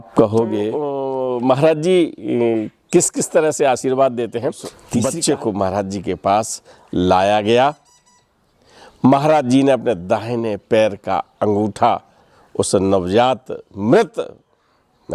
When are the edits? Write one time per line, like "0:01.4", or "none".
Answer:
0:01.0
0:04.7